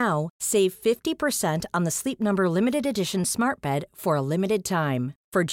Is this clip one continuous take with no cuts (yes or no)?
yes